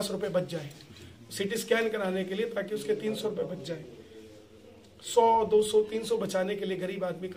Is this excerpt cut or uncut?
uncut